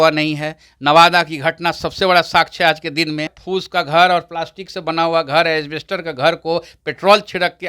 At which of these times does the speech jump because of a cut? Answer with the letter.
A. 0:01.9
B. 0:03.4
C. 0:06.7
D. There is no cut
B